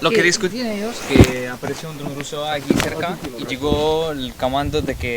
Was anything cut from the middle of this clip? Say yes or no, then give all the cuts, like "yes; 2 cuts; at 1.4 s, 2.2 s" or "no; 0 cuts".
no; 0 cuts